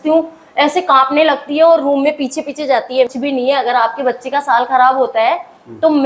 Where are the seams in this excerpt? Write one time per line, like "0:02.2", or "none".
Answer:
0:03.1